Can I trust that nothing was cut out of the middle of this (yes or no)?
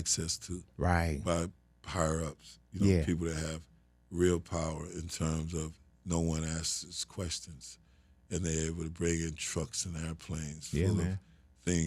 yes